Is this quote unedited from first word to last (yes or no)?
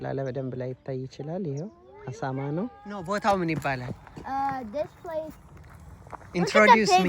no